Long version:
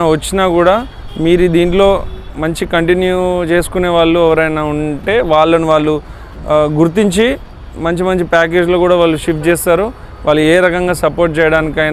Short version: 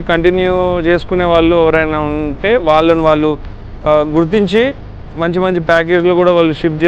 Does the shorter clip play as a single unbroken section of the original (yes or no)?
yes